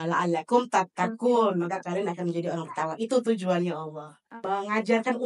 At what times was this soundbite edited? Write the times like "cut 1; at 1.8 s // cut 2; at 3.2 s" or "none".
cut 1; at 4.2 s